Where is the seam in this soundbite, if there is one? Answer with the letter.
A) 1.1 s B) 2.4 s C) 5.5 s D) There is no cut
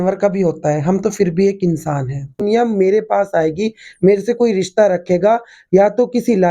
B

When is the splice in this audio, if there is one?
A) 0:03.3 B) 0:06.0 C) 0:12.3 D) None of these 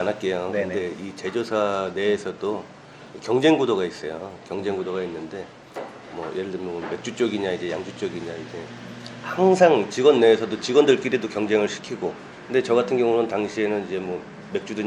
C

